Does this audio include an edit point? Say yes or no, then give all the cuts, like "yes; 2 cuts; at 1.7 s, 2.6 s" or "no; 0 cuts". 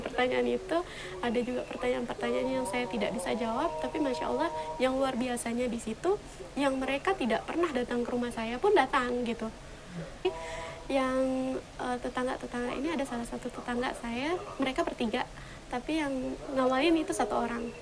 yes; 1 cut; at 10.2 s